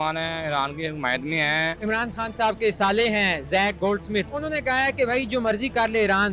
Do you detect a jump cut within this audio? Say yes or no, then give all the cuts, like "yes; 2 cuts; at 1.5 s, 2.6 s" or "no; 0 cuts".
yes; 2 cuts; at 1.8 s, 4.3 s